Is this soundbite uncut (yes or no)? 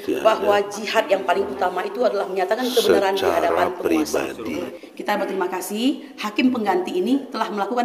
no